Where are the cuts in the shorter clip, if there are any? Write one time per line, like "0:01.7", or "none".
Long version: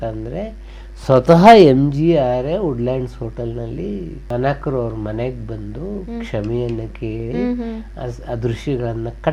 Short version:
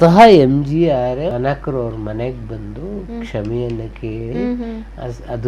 0:01.3